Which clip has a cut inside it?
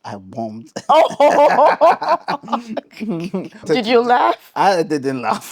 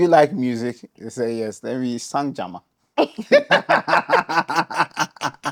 first; 1 cut; at 3.7 s

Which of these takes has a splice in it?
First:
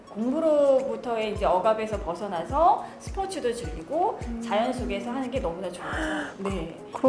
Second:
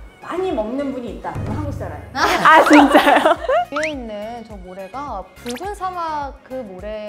second; 1 cut; at 3.4 s

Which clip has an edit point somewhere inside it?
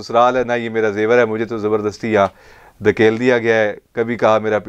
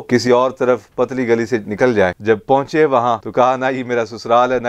second; 2 cuts; at 2.2 s, 3.2 s

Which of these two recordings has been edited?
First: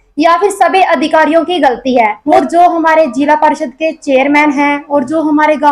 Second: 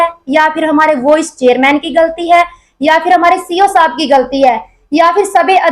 first; 1 cut; at 2.2 s

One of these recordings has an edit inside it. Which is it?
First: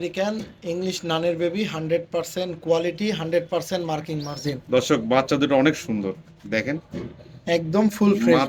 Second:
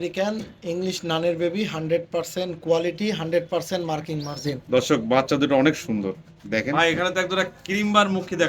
second; 1 cut; at 6.7 s

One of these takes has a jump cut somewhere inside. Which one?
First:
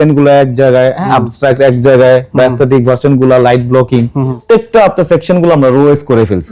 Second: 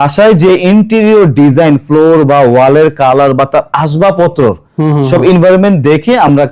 first; 2 cuts; at 1.0 s, 4.4 s

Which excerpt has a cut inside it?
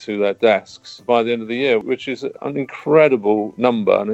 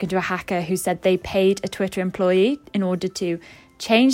first; 1 cut; at 2.2 s

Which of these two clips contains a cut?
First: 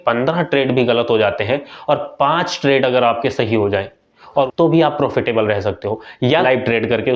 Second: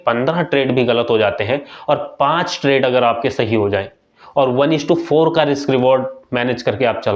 first; 2 cuts; at 4.5 s, 6.4 s

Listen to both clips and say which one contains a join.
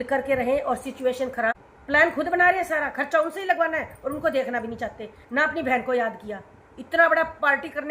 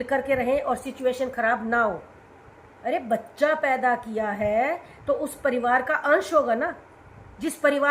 first; 1 cut; at 1.5 s

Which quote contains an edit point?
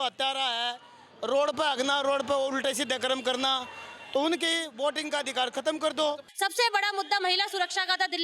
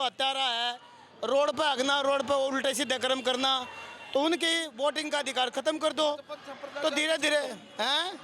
first; 1 cut; at 6.3 s

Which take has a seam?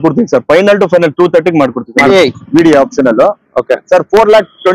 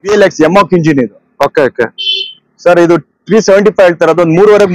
first; 1 cut; at 2.1 s

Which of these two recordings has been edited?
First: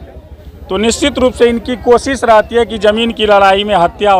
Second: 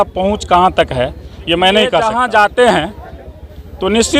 second; 1 cut; at 2.1 s

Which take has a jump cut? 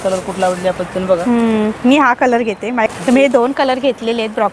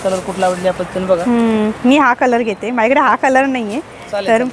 first; 1 cut; at 2.9 s

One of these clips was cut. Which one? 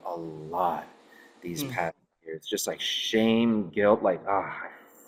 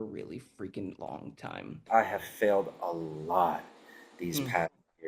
second; 1 cut; at 1.8 s

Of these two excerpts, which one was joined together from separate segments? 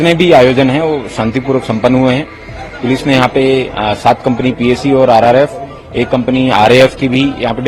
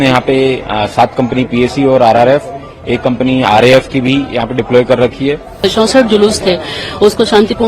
second; 1 cut; at 5.6 s

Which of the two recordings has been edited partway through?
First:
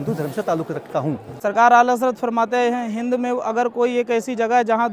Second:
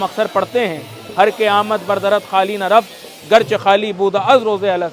first; 1 cut; at 1.3 s

